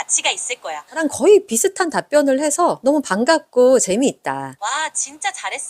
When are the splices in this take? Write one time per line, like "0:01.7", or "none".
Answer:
0:01.0